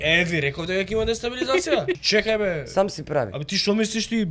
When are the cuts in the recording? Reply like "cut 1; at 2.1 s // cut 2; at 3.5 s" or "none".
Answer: cut 1; at 2.0 s

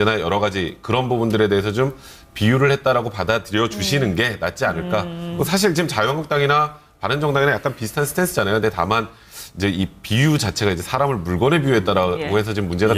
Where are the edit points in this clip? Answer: cut 1; at 5.3 s

